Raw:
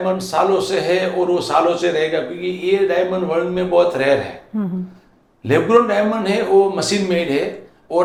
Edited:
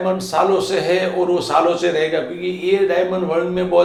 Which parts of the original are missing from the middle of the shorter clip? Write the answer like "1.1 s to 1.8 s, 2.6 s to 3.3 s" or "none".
none